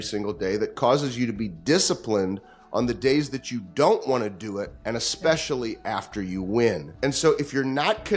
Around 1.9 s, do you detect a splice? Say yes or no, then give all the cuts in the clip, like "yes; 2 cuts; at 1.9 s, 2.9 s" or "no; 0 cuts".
no; 2 cuts; at 4.7 s, 6.9 s